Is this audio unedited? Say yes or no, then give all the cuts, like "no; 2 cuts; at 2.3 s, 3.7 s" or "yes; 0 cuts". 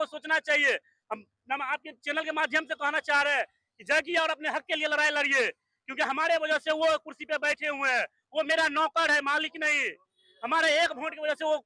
yes; 0 cuts